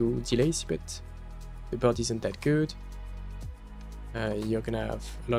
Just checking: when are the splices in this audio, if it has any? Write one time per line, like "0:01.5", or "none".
none